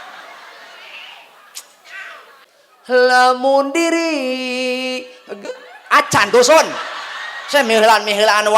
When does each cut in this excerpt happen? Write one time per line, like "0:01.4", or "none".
0:02.4